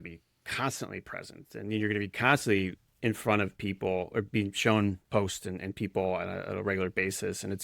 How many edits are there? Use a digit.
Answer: 1